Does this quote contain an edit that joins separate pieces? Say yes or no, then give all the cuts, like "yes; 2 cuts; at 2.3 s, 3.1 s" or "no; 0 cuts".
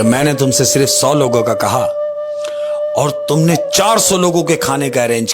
no; 0 cuts